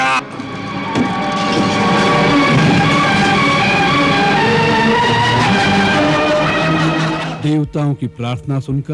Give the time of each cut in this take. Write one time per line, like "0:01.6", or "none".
0:07.2

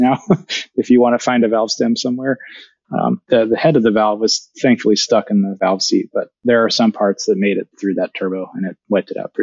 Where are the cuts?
0:06.3
0:07.7

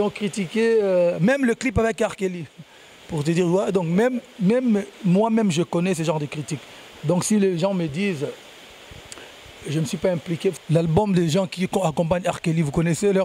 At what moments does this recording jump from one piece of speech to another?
0:10.6

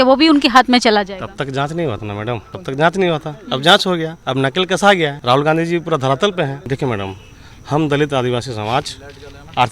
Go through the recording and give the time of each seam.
0:02.5
0:04.2
0:05.2
0:06.6

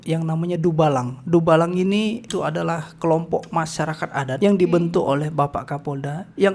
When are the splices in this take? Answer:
0:02.3
0:04.3

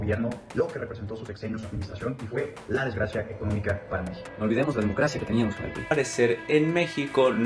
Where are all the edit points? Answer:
0:05.9

